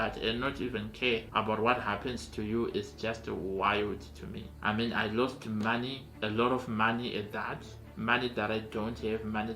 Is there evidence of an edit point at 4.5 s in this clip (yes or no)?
yes